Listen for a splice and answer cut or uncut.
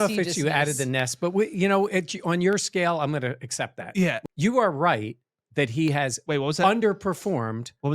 cut